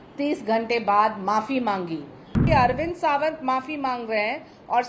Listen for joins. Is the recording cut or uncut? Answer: cut